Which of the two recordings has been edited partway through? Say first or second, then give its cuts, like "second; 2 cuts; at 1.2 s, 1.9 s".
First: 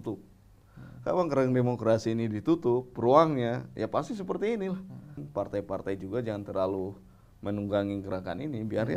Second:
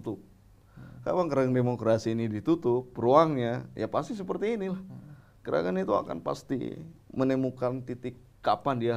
first; 1 cut; at 5.2 s